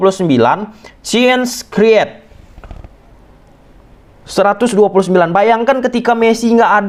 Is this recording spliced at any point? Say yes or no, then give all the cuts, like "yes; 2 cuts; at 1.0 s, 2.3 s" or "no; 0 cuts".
no; 0 cuts